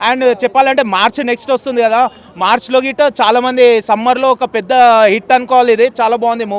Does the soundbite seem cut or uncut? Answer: uncut